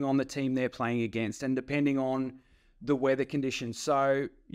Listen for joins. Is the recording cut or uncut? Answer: uncut